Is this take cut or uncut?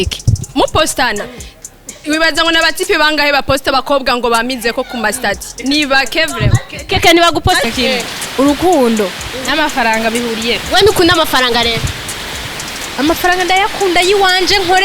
cut